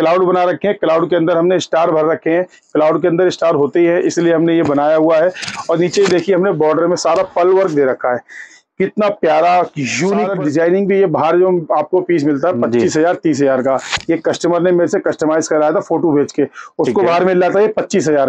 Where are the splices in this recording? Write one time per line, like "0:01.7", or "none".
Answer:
0:10.3